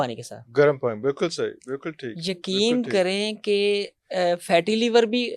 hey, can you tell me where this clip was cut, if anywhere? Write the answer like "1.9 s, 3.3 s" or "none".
none